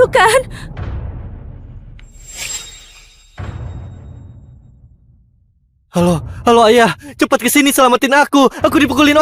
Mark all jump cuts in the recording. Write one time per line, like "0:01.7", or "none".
none